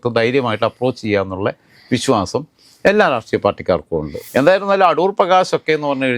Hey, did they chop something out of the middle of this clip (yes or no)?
yes